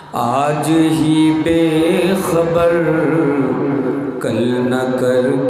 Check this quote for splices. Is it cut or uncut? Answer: uncut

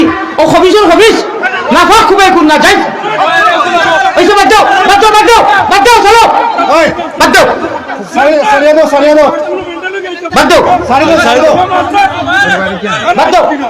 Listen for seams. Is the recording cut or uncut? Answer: uncut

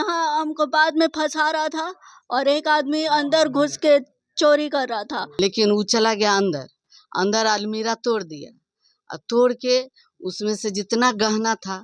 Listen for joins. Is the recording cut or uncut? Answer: cut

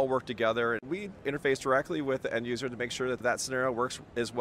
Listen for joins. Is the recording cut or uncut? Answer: cut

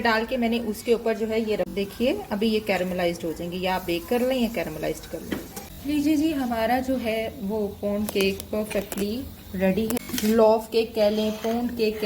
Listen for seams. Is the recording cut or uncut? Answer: cut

